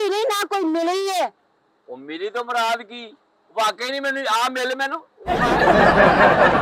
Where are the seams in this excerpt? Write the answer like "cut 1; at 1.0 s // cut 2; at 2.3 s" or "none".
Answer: none